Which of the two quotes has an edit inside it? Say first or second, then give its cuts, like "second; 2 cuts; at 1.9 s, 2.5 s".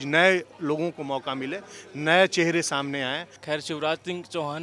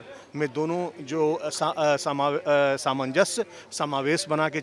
first; 1 cut; at 3.3 s